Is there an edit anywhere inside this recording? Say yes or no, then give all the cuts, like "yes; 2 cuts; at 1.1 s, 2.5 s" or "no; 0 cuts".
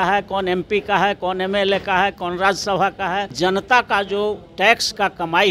yes; 1 cut; at 3.3 s